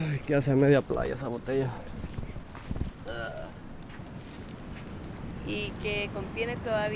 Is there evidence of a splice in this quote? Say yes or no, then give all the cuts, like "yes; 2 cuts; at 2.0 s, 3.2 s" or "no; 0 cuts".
no; 0 cuts